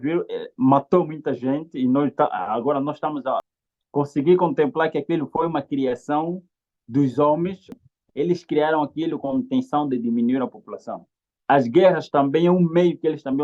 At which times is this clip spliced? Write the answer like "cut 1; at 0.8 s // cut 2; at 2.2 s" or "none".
cut 1; at 3.4 s // cut 2; at 7.8 s